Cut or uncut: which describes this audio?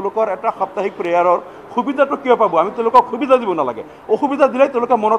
uncut